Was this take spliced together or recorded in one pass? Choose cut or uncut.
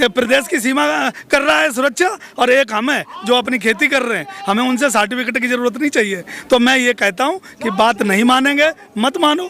uncut